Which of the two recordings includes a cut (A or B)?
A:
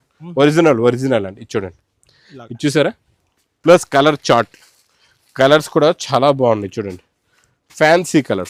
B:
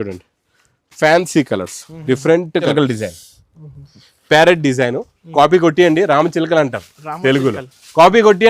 B